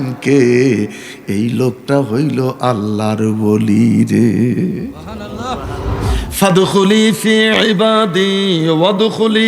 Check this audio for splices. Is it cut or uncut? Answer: cut